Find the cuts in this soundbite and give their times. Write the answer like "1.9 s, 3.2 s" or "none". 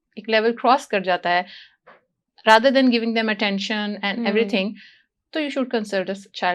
none